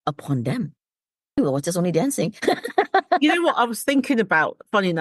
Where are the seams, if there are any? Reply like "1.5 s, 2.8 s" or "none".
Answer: 1.4 s

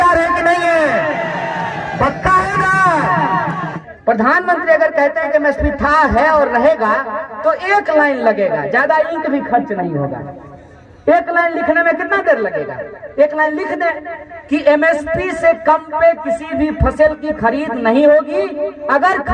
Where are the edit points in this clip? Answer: 3.7 s

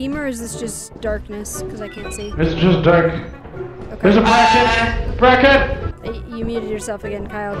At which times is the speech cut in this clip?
5.9 s

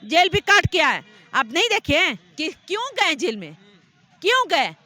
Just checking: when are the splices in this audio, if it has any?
none

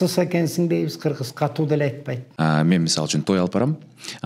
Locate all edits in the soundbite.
2.2 s

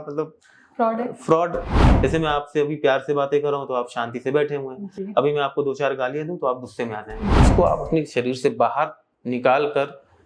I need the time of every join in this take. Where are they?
1.7 s, 7.5 s

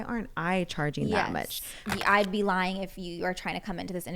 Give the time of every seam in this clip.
1.9 s

